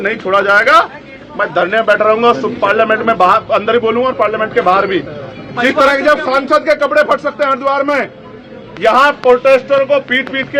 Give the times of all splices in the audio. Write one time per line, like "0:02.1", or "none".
none